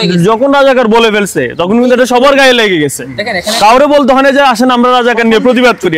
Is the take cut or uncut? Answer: uncut